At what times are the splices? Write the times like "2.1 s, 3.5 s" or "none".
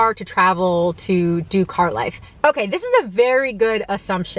2.2 s